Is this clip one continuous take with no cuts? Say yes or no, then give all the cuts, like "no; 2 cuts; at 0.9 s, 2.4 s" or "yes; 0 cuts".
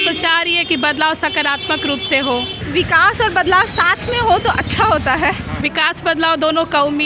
no; 2 cuts; at 2.6 s, 5.6 s